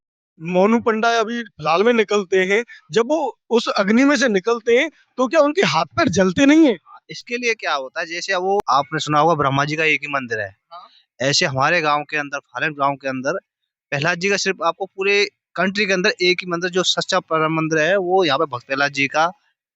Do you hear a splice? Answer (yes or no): yes